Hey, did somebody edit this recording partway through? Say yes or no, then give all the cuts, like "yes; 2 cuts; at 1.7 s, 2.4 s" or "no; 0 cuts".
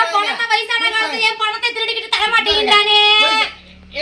no; 0 cuts